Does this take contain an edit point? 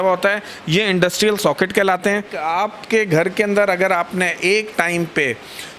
yes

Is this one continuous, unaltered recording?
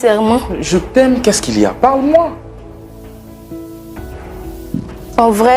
no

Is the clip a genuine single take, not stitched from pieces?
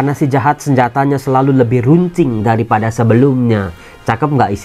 yes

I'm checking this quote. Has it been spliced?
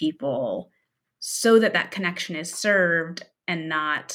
no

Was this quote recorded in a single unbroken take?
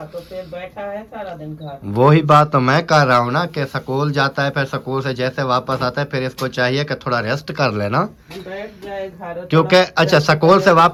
yes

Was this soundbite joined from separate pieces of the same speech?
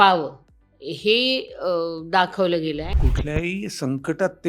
yes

